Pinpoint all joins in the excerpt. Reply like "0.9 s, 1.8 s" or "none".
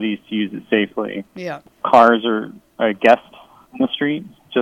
1.8 s, 3.5 s